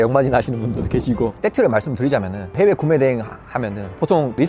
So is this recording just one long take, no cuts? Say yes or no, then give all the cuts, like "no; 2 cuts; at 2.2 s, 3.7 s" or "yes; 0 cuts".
no; 1 cut; at 1.4 s